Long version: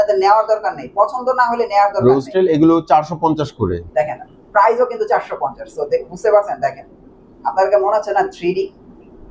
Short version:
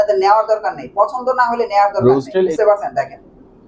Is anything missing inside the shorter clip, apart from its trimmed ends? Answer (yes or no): yes